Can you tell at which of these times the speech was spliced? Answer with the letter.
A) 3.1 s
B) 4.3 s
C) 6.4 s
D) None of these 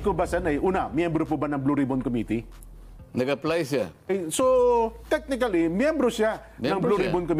B